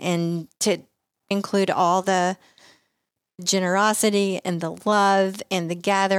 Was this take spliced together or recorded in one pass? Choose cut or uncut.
cut